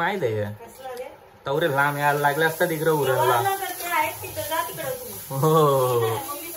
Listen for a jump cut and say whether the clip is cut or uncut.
uncut